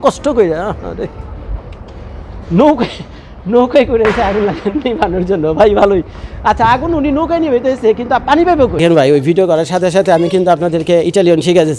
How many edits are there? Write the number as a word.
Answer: one